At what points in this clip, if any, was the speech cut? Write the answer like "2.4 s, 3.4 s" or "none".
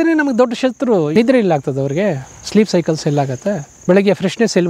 1.1 s, 3.7 s